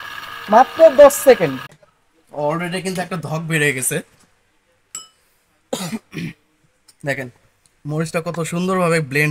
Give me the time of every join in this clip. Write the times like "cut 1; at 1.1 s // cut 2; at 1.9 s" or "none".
cut 1; at 1.5 s

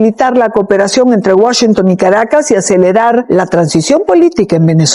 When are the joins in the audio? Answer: none

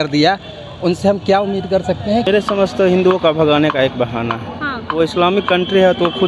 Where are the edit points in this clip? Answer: cut 1; at 2.3 s

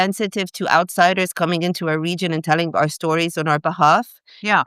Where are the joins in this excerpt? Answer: none

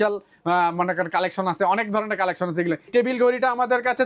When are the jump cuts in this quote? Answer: cut 1; at 2.9 s

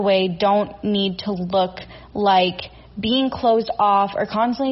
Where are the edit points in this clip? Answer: none

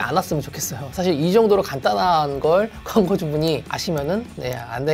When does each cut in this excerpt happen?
none

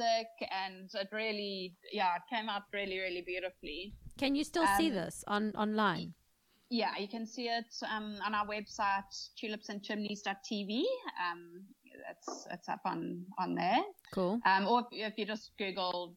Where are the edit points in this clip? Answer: none

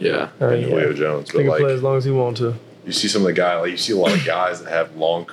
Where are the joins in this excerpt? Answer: none

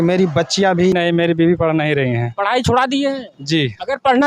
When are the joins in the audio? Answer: cut 1; at 0.9 s

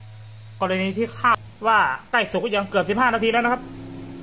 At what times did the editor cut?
cut 1; at 1.3 s

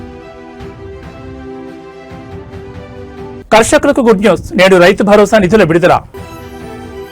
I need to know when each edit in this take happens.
none

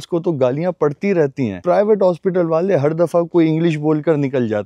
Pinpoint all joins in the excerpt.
none

